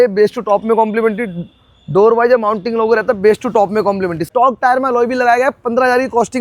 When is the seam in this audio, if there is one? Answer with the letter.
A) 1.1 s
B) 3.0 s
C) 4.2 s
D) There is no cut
C